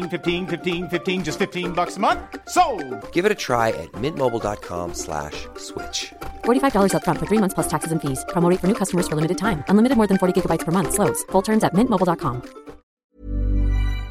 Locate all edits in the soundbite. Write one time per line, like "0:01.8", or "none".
0:13.0